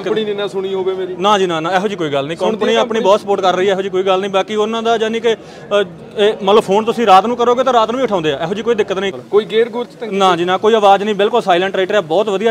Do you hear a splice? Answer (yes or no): yes